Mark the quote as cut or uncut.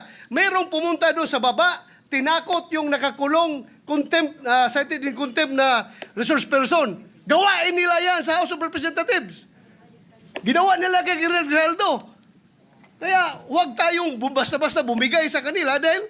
uncut